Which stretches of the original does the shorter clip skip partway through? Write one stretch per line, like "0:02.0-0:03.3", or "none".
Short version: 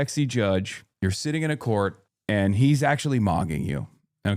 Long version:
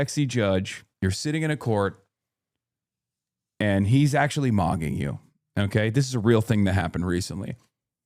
0:02.1-0:03.4